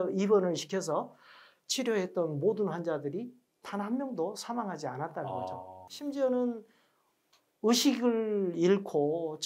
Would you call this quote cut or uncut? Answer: uncut